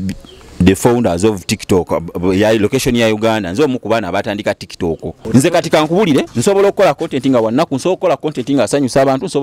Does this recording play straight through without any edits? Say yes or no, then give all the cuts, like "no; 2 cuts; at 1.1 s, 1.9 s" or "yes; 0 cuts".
no; 1 cut; at 5.2 s